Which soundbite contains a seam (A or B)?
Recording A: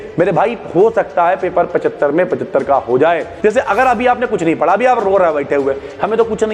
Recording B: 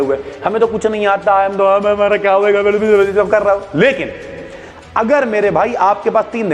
A